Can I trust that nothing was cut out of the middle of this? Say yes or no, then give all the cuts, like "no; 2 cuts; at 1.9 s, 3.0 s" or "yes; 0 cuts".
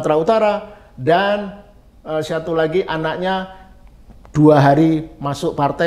yes; 0 cuts